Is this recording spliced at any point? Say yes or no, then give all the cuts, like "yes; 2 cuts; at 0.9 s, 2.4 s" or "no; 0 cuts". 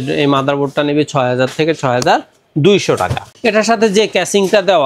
yes; 1 cut; at 3.3 s